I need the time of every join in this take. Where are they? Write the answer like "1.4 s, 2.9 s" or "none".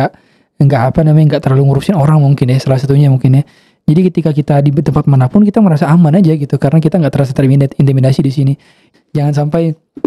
8.8 s